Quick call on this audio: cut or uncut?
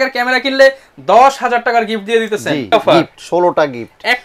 cut